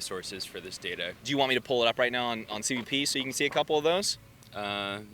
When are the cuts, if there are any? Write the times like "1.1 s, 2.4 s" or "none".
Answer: 1.2 s